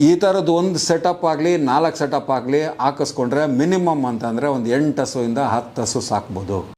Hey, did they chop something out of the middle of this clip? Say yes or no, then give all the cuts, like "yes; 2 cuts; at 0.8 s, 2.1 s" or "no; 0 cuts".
no; 0 cuts